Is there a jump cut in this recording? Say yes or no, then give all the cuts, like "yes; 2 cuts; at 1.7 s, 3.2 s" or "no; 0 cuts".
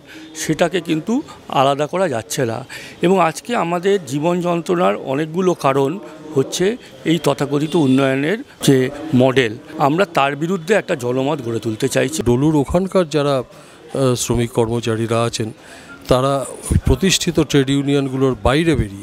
no; 0 cuts